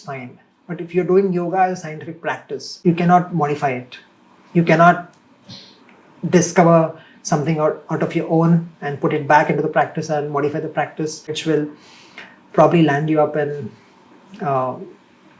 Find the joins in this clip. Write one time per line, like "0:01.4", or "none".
0:02.7
0:11.3